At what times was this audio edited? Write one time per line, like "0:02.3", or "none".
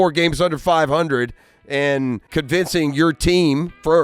0:02.2